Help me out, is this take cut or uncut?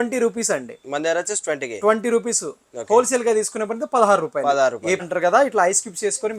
cut